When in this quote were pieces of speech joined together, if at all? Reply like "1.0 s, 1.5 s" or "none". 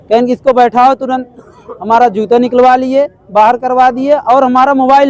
none

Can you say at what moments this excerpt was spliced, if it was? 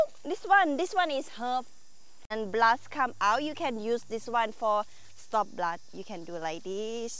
2.3 s

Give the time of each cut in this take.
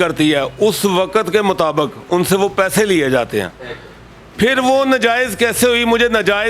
none

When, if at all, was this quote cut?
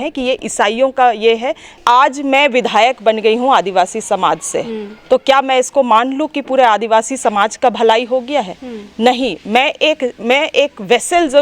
1.8 s

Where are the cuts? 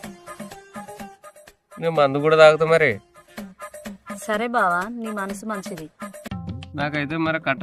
none

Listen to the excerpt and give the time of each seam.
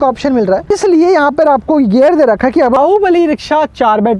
0.7 s, 2.8 s

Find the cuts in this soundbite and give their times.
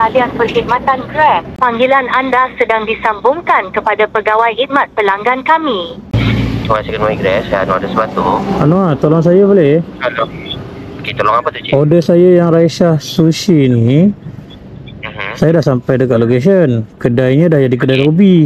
none

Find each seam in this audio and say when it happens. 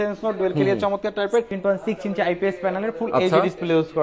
1.5 s

